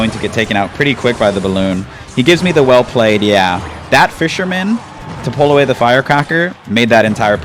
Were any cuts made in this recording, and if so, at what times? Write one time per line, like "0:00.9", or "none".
none